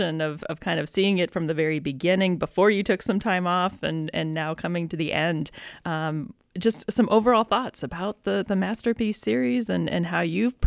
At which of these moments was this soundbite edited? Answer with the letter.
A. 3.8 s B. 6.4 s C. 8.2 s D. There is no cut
D